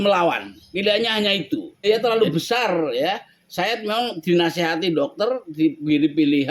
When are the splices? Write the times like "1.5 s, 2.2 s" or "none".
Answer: 1.8 s